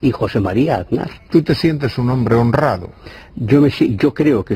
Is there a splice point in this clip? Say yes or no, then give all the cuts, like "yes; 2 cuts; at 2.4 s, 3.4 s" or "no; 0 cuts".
no; 0 cuts